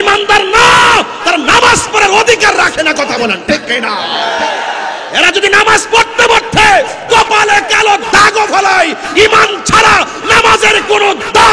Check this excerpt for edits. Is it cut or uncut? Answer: uncut